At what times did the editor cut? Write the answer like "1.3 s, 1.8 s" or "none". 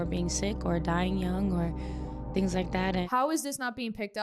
3.0 s